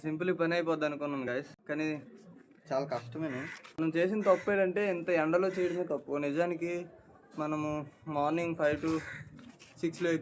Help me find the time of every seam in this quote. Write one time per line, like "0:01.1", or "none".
0:01.3
0:03.7